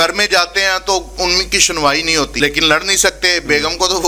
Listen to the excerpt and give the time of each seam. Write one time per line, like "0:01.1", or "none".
0:02.3